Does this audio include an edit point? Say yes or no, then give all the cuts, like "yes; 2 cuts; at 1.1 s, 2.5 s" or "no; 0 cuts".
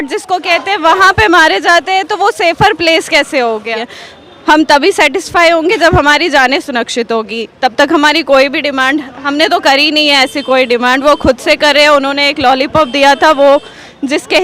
yes; 1 cut; at 3.7 s